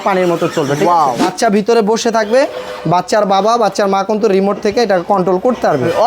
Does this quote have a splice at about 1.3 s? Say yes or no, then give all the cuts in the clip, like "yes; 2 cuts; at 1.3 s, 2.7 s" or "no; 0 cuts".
yes; 1 cut; at 1.3 s